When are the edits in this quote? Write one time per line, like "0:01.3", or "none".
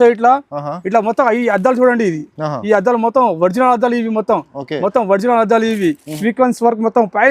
0:06.1